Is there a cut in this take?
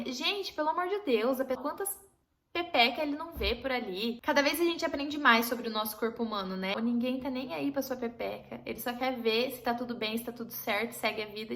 yes; 3 cuts; at 1.6 s, 4.2 s, 6.8 s

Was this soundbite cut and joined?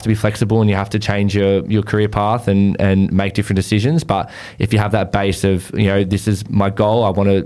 no; 0 cuts

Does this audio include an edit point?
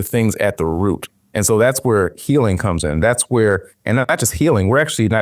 yes; 1 cut; at 1.1 s

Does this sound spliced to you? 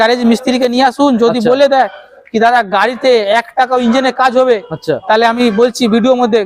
no; 0 cuts

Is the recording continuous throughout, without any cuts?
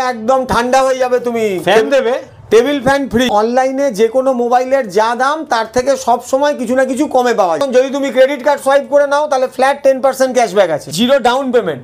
no; 3 cuts; at 3.3 s, 7.6 s, 10.9 s

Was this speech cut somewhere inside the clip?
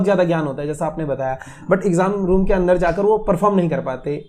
no; 0 cuts

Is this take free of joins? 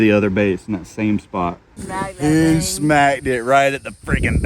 no; 1 cut; at 1.8 s

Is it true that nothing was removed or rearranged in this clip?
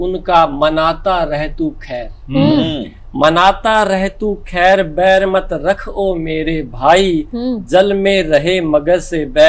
yes; 0 cuts

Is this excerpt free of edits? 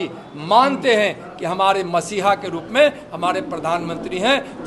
yes; 0 cuts

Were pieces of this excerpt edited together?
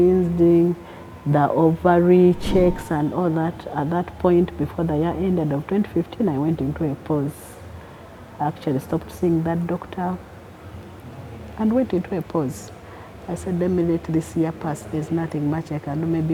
no; 0 cuts

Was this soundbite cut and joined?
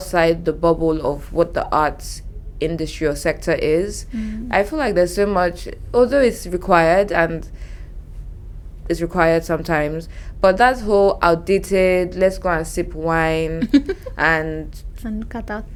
no; 0 cuts

